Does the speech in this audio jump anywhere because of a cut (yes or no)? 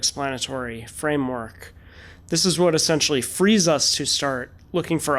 no